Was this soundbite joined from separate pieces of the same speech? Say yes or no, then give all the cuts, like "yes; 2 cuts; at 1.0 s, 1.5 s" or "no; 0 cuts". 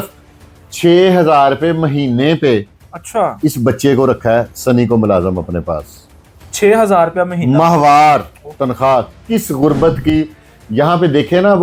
no; 0 cuts